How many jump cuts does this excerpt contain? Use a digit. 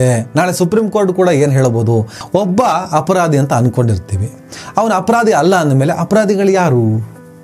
1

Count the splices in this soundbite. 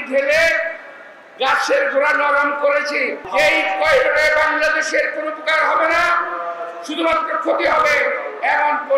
1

